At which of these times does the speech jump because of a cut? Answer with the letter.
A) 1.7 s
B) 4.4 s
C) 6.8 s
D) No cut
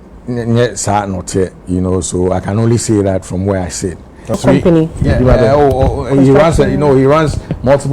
B